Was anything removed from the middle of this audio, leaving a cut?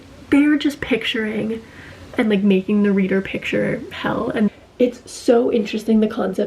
yes; 1 cut; at 4.5 s

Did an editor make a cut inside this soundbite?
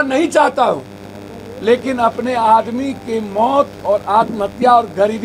no; 0 cuts

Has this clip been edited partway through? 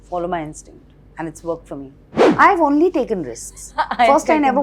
yes; 1 cut; at 2.2 s

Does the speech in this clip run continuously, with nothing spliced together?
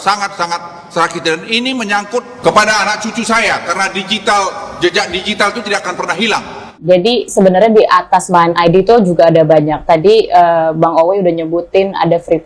no; 1 cut; at 6.7 s

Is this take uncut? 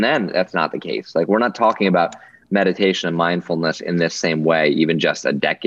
yes; 0 cuts

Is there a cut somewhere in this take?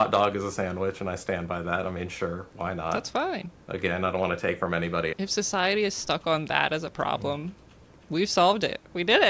yes; 1 cut; at 5.1 s

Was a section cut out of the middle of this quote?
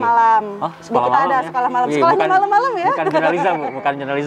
no; 0 cuts

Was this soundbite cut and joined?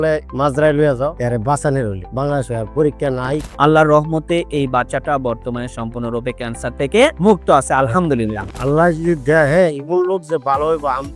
yes; 3 cuts; at 1.2 s, 3.5 s, 8.5 s

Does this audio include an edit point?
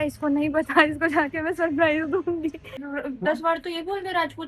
yes; 1 cut; at 2.7 s

